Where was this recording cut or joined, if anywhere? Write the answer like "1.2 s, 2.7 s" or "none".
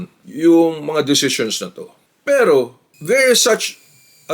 none